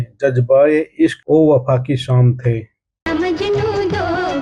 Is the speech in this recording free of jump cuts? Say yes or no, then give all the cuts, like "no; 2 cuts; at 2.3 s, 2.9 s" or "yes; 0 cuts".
no; 1 cut; at 3.0 s